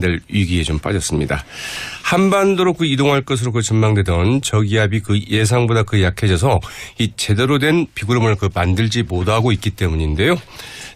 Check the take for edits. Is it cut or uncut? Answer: uncut